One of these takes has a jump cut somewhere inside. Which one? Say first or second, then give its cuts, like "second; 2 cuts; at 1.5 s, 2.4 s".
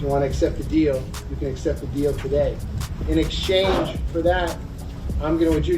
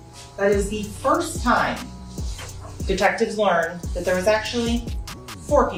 first; 1 cut; at 2.6 s